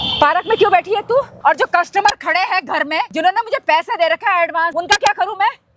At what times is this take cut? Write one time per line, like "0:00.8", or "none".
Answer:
0:01.3
0:03.1
0:04.7